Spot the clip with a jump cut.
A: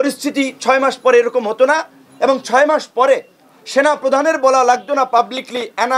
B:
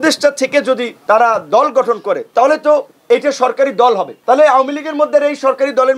B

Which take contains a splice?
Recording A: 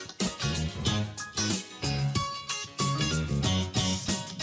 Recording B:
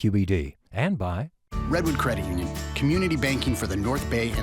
B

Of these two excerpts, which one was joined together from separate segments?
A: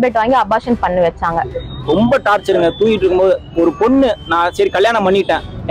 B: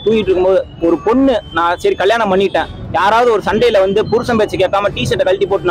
A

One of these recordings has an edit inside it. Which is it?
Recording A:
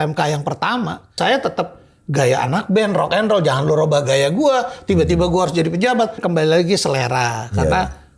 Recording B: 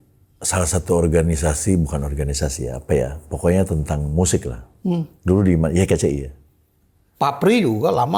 A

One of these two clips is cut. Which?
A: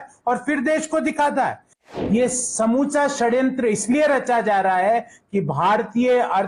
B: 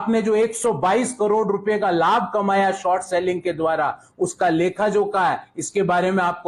A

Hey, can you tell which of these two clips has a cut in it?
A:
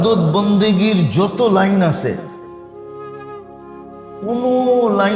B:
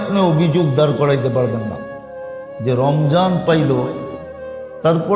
A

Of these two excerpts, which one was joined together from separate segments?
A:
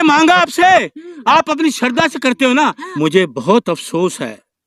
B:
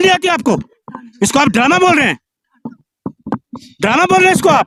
A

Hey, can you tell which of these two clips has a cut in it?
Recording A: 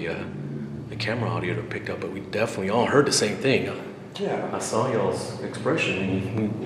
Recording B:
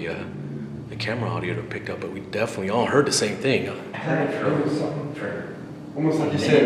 B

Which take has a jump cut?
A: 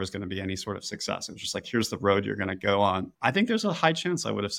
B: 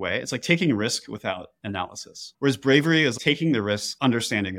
B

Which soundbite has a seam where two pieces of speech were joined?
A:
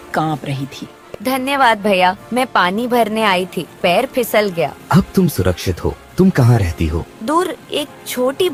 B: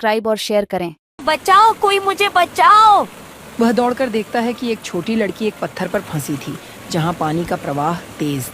B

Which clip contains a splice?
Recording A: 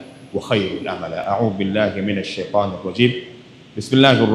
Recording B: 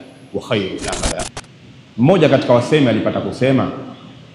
B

